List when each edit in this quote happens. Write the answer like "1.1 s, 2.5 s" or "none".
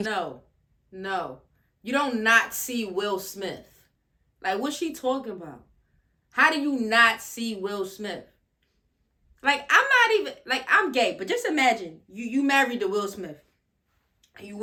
none

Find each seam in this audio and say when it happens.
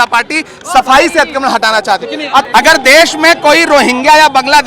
2.5 s

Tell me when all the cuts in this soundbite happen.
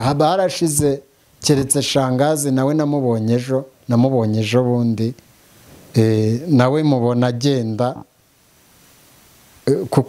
none

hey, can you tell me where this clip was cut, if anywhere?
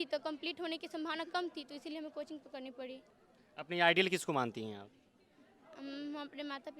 3.1 s

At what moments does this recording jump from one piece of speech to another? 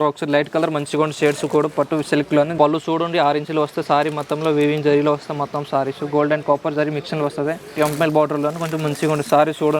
2.5 s, 7.7 s

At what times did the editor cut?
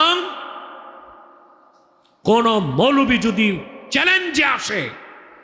none

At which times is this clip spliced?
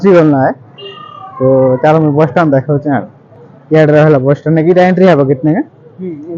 none

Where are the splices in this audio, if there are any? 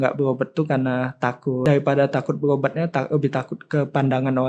1.6 s

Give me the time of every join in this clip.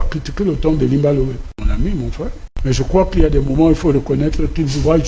1.7 s, 2.5 s

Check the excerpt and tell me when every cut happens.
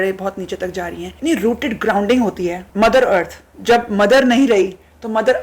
1.1 s, 2.6 s

